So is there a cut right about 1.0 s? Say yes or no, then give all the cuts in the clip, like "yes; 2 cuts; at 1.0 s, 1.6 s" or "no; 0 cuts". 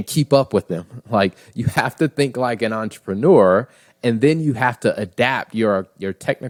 no; 0 cuts